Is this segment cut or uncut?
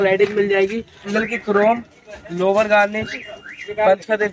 cut